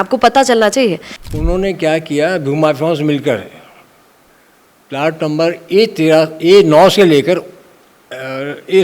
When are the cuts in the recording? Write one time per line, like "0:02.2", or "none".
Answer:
0:01.1